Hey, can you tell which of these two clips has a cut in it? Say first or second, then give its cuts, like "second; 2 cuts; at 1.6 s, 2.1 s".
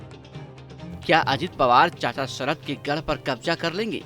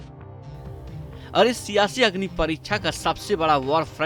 first; 1 cut; at 1.0 s